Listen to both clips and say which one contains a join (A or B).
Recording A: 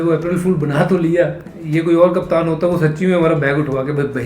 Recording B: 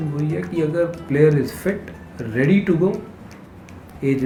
A